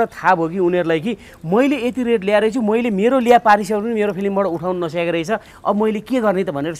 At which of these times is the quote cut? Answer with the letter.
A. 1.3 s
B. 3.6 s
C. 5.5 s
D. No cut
D